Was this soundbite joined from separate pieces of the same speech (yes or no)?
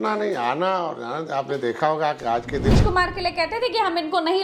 yes